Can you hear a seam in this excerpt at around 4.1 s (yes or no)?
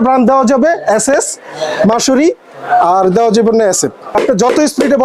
yes